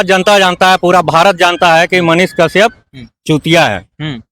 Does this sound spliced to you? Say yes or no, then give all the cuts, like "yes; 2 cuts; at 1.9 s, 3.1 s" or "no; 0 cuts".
no; 0 cuts